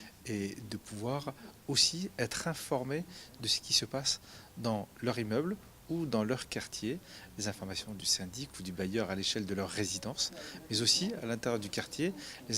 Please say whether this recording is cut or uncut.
cut